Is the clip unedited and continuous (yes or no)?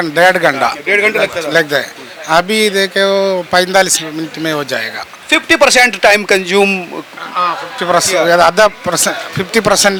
yes